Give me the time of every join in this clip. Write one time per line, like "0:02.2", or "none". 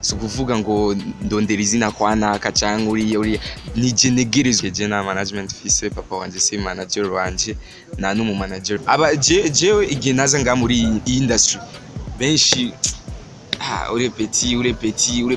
0:04.6
0:08.7